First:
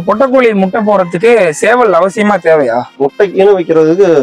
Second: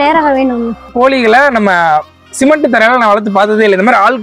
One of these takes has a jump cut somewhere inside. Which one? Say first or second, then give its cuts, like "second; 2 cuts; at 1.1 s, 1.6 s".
second; 1 cut; at 0.9 s